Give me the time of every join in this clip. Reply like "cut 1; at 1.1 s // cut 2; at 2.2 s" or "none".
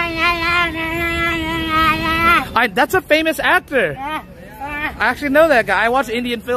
none